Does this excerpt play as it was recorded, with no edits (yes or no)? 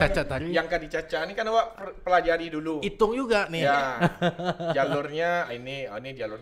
yes